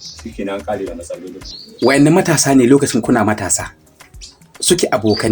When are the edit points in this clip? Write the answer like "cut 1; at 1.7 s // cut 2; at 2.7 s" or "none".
cut 1; at 1.4 s